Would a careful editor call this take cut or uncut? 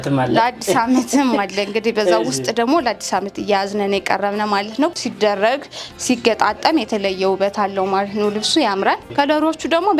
cut